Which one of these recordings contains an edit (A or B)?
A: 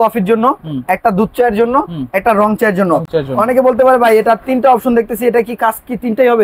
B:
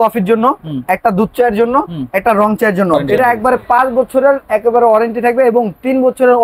B